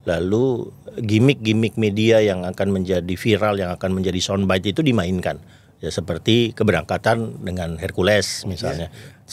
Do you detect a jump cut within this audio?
no; 0 cuts

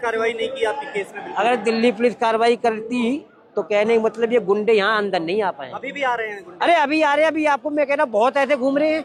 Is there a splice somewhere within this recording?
no; 0 cuts

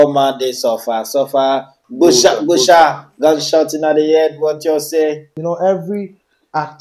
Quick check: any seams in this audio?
yes; 1 cut; at 5.3 s

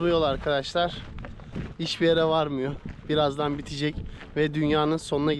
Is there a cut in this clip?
no; 0 cuts

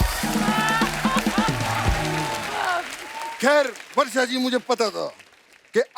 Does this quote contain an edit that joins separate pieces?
no; 0 cuts

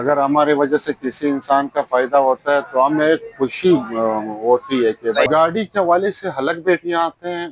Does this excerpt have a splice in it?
yes; 1 cut; at 5.3 s

